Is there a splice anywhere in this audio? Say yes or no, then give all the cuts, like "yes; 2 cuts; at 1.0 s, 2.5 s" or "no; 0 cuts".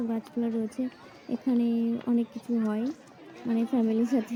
no; 0 cuts